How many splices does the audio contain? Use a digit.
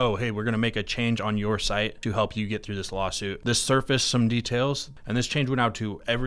3